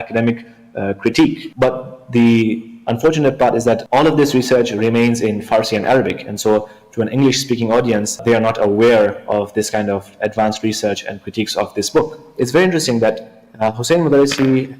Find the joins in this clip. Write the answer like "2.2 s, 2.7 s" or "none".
1.4 s, 3.8 s, 8.2 s, 12.2 s

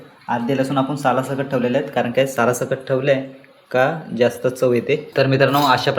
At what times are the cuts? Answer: 5.1 s

